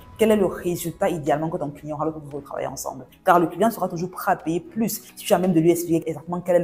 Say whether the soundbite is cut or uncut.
uncut